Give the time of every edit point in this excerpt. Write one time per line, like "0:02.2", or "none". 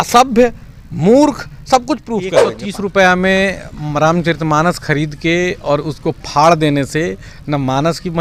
0:02.5